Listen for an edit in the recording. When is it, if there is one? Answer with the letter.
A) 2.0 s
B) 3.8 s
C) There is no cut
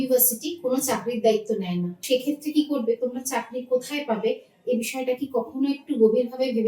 A